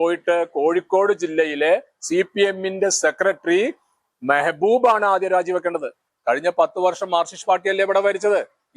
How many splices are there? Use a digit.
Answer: 1